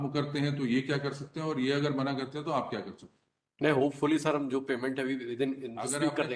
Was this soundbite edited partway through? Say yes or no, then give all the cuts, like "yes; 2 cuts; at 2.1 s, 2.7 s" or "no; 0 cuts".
no; 0 cuts